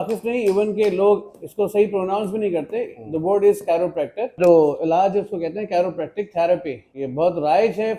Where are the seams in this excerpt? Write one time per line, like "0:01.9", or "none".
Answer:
0:04.3
0:07.0